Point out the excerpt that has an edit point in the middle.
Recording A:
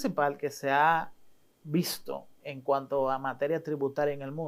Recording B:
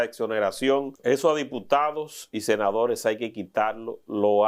B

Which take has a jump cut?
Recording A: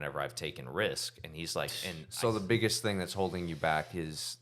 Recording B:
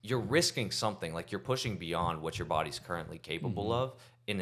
A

